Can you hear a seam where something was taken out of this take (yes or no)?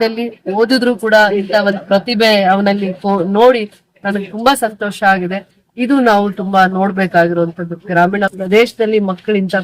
no